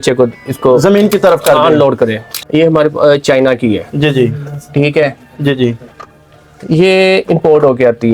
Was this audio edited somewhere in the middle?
yes; 1 cut; at 2.3 s

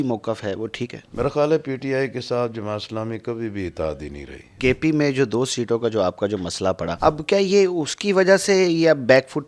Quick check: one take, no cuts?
no; 3 cuts; at 1.0 s, 4.5 s, 6.9 s

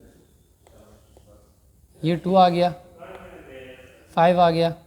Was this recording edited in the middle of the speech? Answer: no; 0 cuts

